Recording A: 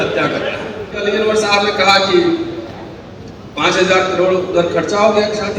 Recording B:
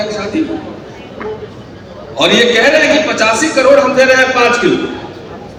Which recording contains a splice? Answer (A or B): A